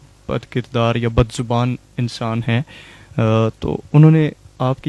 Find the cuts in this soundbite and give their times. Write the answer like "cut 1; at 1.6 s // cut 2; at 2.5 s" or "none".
none